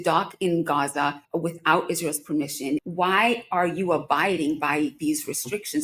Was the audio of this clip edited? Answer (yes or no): yes